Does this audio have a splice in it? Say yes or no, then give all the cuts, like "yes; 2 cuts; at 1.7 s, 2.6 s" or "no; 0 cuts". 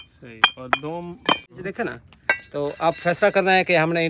yes; 1 cut; at 1.6 s